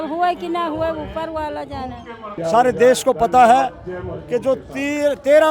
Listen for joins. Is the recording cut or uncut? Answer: cut